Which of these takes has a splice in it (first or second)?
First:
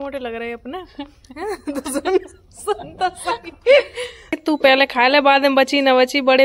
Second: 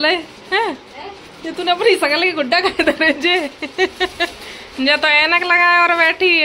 first